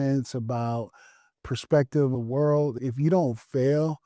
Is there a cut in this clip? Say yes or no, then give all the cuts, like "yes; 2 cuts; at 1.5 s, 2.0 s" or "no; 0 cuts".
yes; 2 cuts; at 1.2 s, 2.5 s